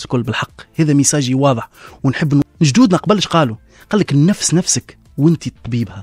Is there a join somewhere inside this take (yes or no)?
yes